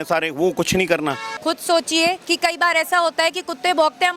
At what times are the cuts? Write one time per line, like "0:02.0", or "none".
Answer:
0:01.3